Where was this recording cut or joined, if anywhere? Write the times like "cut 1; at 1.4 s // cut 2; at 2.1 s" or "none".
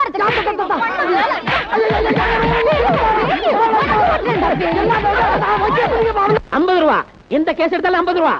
cut 1; at 4.7 s